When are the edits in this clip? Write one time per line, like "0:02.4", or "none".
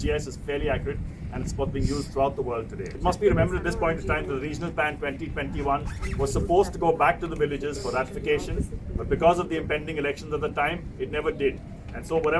none